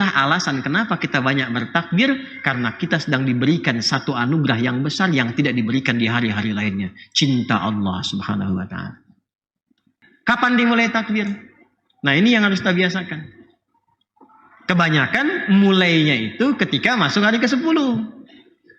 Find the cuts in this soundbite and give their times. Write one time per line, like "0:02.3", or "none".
0:10.1